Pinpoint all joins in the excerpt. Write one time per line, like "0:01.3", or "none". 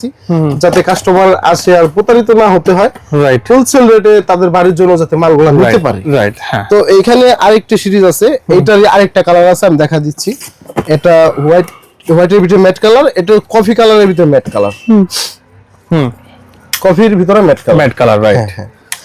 none